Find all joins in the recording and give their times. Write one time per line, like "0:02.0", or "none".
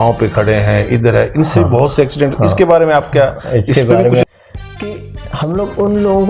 0:04.2